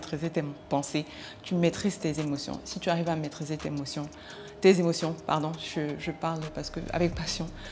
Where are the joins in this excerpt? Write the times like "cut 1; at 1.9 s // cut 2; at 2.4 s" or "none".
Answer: none

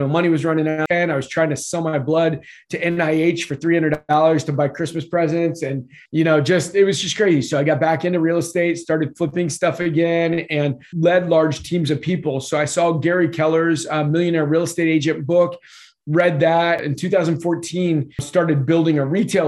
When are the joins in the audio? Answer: cut 1; at 0.8 s // cut 2; at 5.9 s // cut 3; at 10.9 s // cut 4; at 16.8 s // cut 5; at 18.3 s

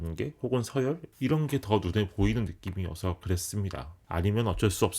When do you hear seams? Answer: cut 1; at 4.0 s

